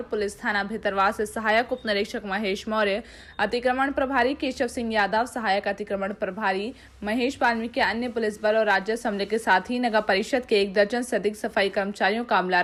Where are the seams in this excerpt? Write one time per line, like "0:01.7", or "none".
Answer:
none

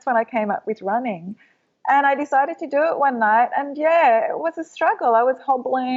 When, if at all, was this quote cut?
none

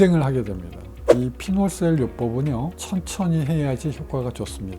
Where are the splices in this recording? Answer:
0:01.0
0:02.8

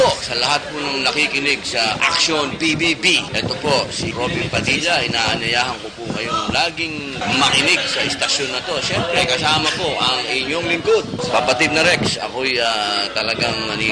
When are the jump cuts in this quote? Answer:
none

